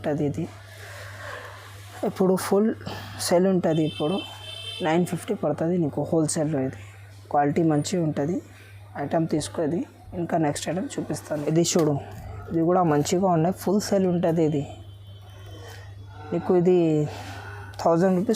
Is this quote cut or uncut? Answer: uncut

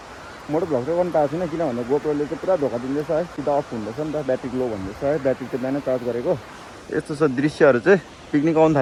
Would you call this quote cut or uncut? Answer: uncut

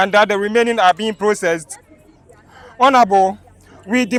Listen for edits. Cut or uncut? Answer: uncut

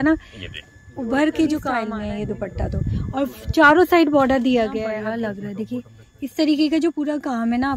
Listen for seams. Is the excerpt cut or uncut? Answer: cut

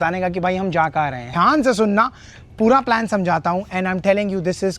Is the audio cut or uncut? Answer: cut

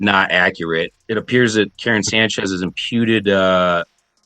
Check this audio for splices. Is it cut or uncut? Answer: cut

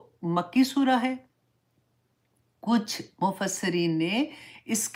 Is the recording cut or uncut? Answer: uncut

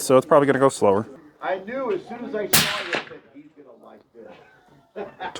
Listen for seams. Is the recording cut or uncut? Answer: cut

